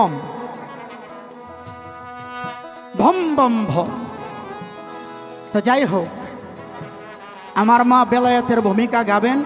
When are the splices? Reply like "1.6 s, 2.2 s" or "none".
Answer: none